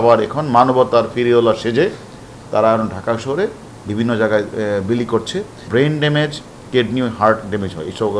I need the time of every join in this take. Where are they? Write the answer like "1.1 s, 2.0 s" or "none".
5.6 s